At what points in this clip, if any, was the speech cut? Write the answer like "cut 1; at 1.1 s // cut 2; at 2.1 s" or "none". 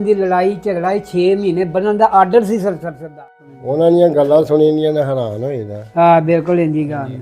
cut 1; at 3.1 s